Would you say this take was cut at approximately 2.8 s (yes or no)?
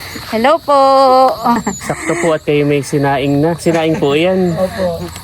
no